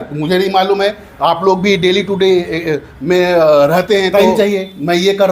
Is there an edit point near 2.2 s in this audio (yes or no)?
no